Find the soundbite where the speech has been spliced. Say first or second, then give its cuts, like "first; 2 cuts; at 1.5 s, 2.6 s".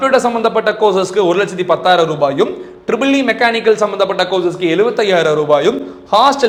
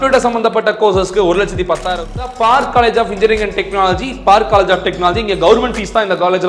second; 1 cut; at 2.2 s